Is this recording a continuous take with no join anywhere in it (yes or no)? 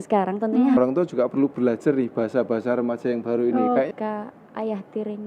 no